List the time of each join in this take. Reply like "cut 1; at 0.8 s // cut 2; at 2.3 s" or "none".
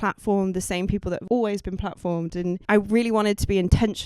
cut 1; at 1.2 s // cut 2; at 2.6 s